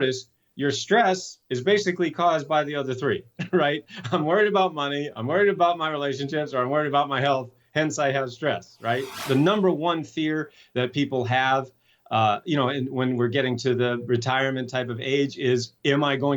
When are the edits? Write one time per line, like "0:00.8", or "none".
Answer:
0:09.2